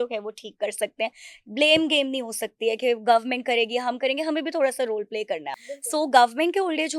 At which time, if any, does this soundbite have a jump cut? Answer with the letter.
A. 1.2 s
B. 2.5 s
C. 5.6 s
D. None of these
C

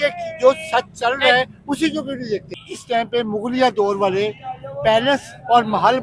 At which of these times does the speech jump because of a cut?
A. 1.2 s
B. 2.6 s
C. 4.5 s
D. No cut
B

